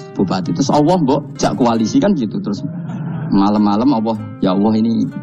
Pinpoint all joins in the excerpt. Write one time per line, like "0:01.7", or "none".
0:01.3
0:04.3